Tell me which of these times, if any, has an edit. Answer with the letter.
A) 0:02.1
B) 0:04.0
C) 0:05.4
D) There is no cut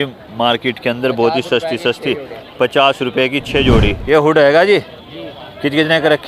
B